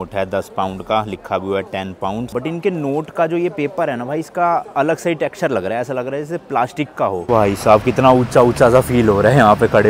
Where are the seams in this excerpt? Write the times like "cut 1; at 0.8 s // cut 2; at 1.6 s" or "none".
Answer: cut 1; at 2.3 s // cut 2; at 7.3 s